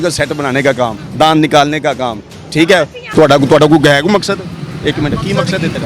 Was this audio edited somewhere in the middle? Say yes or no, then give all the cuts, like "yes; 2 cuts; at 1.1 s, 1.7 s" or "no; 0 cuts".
yes; 2 cuts; at 1.0 s, 3.0 s